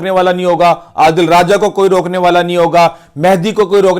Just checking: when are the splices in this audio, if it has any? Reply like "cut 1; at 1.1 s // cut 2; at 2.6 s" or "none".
none